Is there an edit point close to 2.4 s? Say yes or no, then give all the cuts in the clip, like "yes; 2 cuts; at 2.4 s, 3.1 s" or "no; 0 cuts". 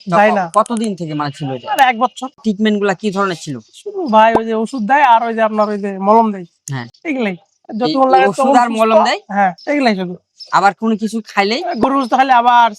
yes; 1 cut; at 2.4 s